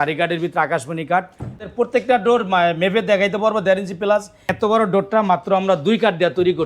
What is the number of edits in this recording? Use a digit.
2